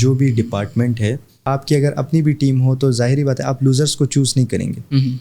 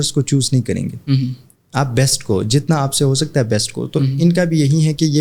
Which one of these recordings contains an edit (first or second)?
first